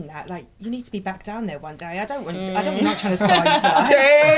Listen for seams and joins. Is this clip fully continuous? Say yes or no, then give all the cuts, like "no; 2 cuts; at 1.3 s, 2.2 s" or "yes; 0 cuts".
yes; 0 cuts